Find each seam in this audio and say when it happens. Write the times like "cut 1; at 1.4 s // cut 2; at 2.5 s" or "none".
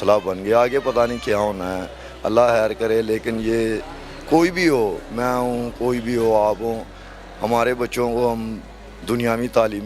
none